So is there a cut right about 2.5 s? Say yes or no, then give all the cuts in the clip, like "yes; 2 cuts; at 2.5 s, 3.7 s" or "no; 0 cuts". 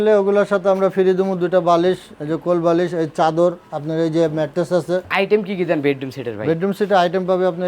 no; 1 cut; at 5.1 s